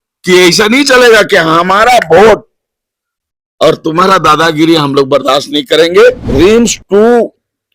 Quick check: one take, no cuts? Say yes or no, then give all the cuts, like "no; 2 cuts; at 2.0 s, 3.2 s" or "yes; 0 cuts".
no; 1 cut; at 6.2 s